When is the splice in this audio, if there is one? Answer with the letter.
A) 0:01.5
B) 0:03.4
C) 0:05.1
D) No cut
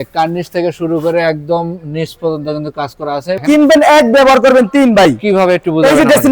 B